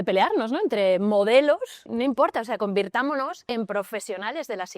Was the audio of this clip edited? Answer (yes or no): yes